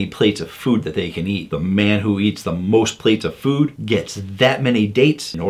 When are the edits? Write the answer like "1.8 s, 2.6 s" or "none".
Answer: none